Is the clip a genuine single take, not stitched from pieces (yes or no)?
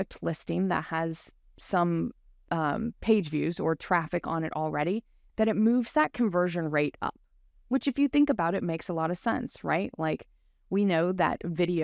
yes